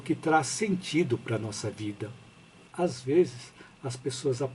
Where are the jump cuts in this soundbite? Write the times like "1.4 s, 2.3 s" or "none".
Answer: 2.6 s

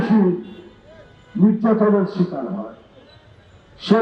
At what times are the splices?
none

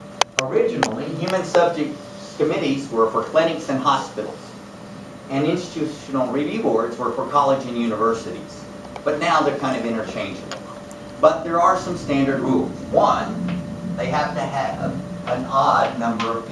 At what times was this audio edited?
13.6 s

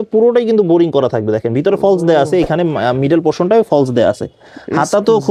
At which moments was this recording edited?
none

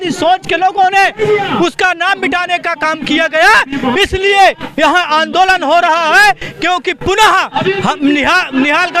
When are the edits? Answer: none

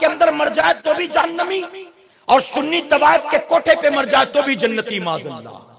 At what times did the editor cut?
none

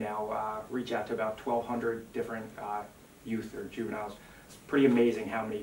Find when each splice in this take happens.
4.4 s

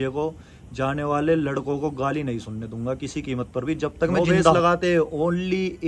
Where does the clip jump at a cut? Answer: 4.5 s

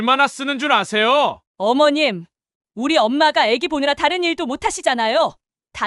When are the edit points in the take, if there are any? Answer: 1.4 s

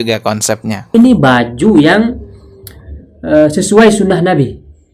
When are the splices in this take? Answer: 0.9 s

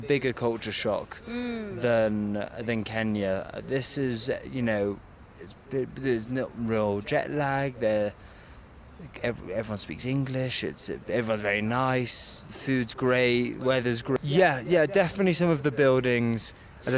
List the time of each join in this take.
14.2 s

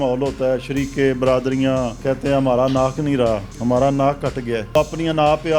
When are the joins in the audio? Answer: 2.0 s, 3.5 s, 4.7 s

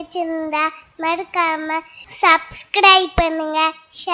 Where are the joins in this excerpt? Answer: none

